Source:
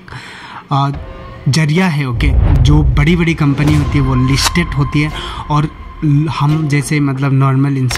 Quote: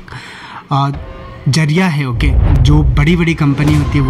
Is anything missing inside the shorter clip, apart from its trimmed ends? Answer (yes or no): no